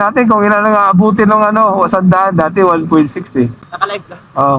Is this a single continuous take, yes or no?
no